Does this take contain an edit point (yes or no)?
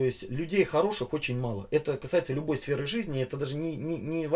no